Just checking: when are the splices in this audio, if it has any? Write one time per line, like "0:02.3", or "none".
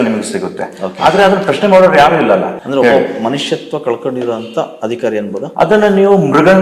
0:02.6